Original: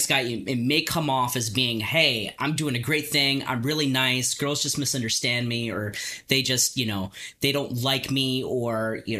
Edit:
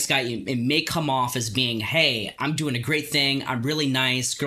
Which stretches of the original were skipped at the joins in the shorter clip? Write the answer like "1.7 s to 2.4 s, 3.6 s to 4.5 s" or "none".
none

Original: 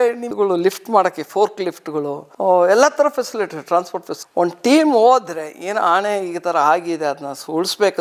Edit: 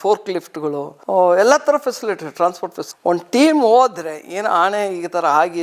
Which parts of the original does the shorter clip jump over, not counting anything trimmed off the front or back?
none

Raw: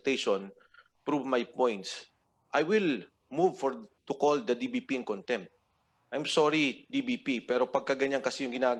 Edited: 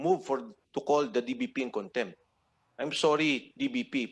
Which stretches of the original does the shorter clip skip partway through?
none

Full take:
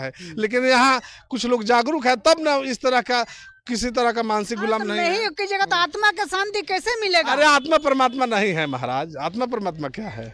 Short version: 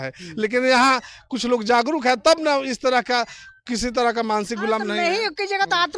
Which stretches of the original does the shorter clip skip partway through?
none

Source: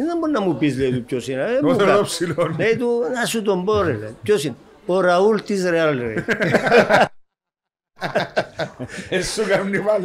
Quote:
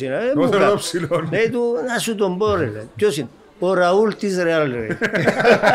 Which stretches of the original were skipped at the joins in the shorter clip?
none

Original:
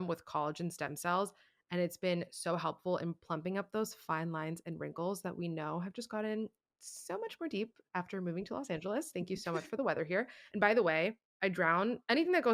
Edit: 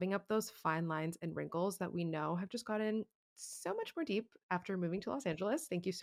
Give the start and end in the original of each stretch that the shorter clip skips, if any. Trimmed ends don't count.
none

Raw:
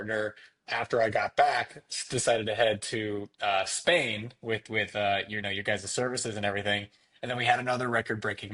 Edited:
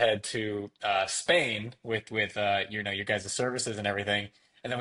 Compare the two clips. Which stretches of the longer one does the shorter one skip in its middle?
none

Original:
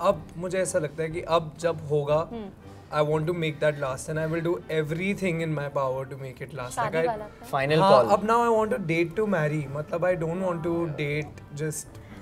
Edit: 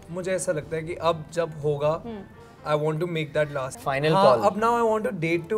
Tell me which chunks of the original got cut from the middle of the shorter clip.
4.0 s to 7.4 s

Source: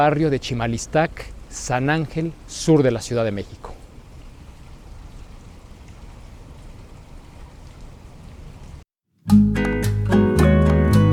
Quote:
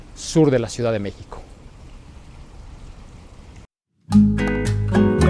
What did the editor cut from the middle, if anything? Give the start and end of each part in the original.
6.0 s to 8.8 s

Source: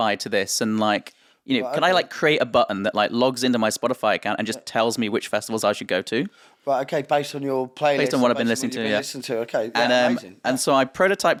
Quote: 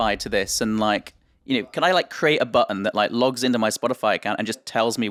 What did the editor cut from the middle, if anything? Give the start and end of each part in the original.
none

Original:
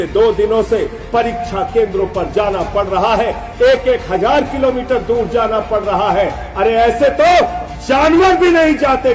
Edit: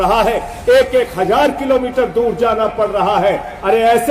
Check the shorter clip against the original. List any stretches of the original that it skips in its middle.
none

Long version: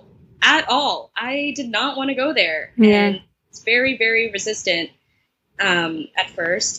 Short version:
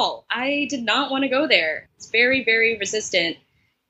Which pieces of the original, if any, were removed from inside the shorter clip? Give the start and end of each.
2.6 s to 3.3 s

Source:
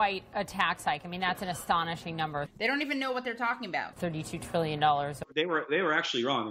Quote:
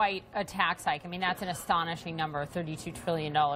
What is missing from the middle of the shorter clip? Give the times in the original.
2.5 s to 4.0 s

